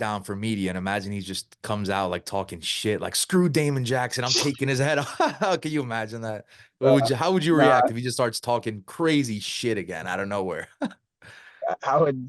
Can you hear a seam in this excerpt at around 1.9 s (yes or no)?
no